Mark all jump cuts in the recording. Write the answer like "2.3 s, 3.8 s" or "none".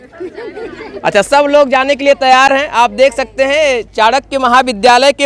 none